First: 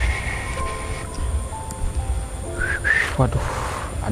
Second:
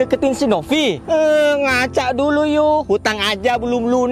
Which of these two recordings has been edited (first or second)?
second